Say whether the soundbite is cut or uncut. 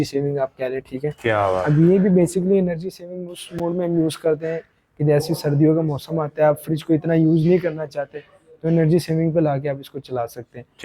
uncut